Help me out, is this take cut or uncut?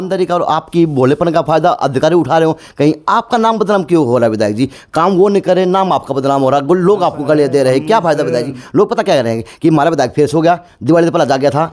uncut